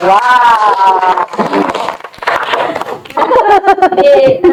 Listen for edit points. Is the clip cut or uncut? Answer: uncut